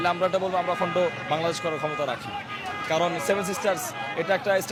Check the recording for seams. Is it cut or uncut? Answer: uncut